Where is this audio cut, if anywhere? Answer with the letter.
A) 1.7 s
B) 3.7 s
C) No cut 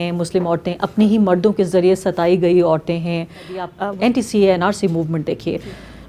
B